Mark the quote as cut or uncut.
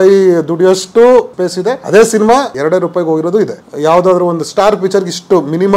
cut